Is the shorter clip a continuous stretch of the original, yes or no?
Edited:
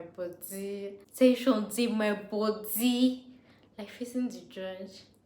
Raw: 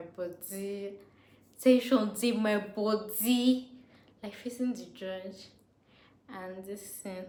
no